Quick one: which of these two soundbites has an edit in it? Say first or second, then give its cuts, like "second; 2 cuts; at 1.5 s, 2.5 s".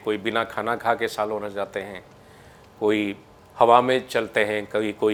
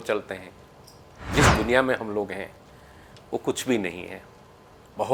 second; 1 cut; at 1.3 s